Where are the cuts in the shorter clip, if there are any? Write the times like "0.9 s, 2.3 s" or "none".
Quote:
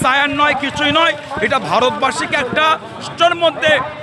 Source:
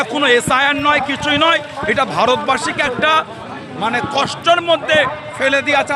3.1 s